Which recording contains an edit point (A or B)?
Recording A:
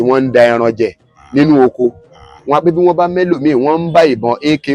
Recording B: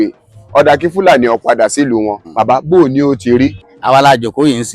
B